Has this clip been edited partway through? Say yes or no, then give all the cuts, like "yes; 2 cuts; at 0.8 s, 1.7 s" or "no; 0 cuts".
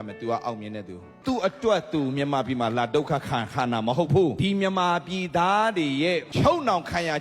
yes; 3 cuts; at 1.1 s, 4.4 s, 6.3 s